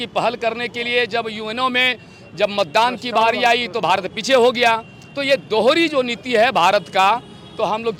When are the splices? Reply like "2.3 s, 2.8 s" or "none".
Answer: none